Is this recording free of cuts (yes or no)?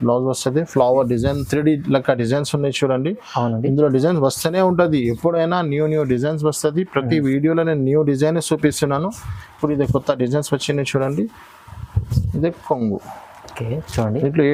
yes